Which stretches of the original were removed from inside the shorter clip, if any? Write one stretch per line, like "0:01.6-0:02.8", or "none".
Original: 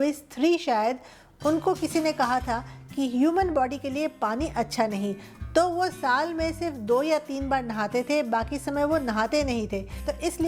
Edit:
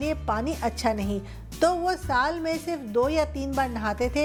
none